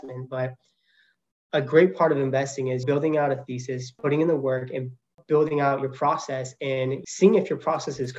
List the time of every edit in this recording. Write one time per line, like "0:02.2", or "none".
0:02.8
0:03.8
0:05.2
0:07.0